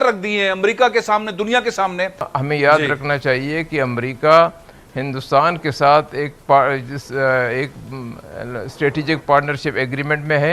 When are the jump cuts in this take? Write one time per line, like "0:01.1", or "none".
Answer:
0:02.3